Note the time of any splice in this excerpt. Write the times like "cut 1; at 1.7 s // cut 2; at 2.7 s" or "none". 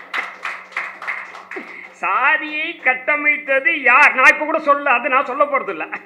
none